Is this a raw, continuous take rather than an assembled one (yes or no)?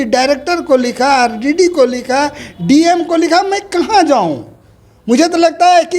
yes